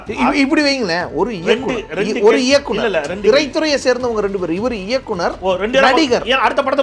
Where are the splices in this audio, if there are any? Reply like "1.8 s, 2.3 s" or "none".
none